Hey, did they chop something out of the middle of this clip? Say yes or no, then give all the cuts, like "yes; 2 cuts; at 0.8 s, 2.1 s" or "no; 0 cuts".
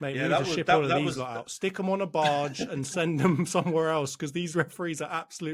no; 0 cuts